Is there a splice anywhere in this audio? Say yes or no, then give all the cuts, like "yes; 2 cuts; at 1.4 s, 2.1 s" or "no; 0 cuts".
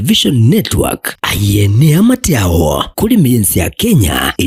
no; 0 cuts